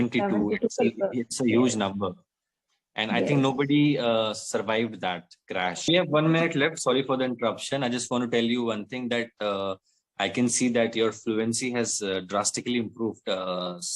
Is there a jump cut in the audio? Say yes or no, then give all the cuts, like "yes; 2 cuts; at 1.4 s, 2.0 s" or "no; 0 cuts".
yes; 1 cut; at 5.9 s